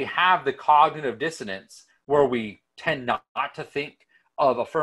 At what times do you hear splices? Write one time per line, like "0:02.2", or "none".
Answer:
none